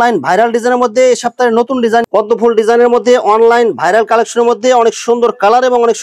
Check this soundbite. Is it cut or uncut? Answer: cut